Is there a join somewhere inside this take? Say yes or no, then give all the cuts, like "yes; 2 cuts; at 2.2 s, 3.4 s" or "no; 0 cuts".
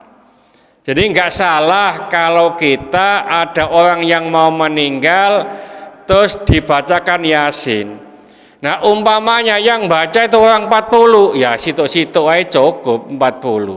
no; 0 cuts